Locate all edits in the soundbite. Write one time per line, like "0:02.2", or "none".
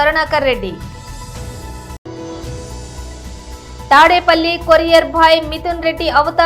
none